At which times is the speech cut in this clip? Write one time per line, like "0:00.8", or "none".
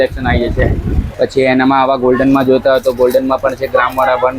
0:01.1